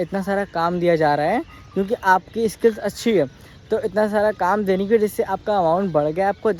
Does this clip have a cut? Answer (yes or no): no